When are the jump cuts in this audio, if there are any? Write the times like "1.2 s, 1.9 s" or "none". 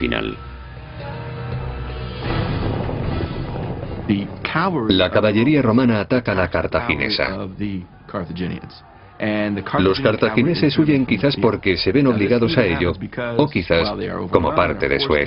none